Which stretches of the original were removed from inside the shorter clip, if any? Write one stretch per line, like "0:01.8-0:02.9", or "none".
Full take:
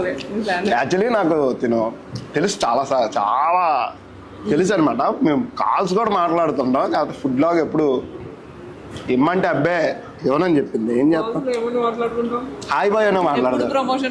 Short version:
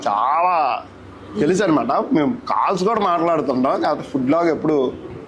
none

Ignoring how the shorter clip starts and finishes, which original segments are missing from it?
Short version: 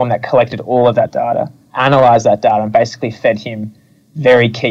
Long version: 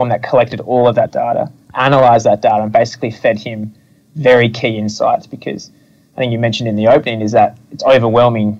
none

